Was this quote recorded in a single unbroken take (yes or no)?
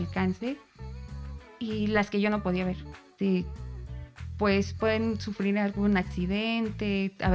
no